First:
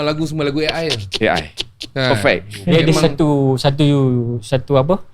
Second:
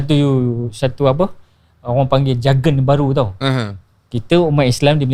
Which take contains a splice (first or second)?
first